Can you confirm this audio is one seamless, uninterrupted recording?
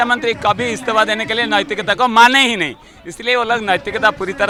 yes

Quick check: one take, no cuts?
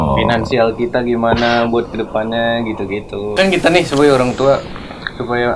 no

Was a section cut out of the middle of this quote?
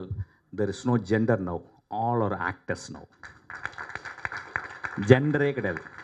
no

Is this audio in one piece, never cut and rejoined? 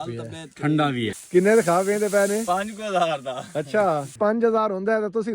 no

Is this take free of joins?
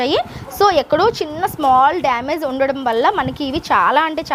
yes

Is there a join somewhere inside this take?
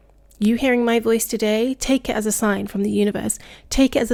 no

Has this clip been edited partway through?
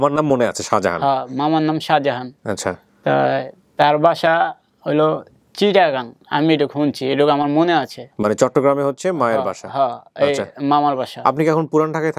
no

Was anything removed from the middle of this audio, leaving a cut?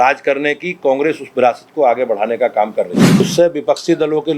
yes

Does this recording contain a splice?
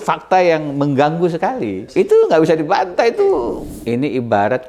yes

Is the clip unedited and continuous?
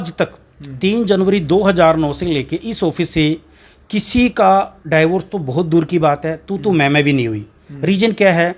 yes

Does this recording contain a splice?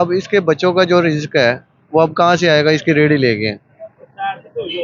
no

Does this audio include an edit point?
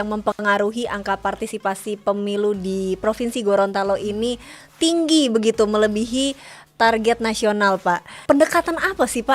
yes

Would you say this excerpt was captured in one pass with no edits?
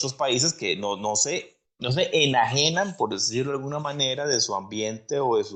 yes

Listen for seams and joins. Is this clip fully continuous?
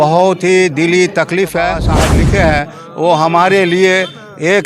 no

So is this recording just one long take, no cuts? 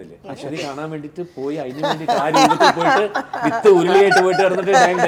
yes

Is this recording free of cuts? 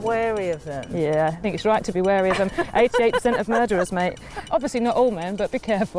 no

